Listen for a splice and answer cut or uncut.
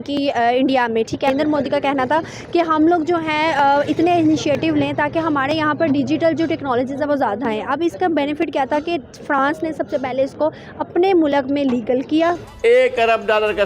cut